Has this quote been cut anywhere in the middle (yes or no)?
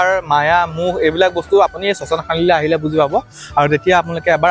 no